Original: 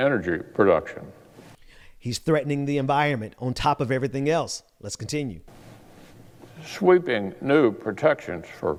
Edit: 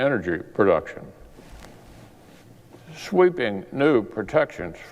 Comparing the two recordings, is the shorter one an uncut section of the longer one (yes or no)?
no